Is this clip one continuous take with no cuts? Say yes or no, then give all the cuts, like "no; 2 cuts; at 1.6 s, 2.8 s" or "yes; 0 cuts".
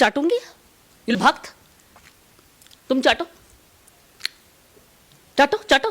no; 1 cut; at 1.1 s